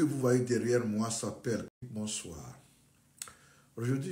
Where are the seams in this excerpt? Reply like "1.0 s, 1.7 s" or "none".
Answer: 1.8 s